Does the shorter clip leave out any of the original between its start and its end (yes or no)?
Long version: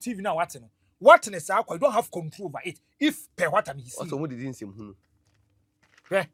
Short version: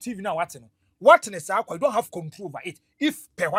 no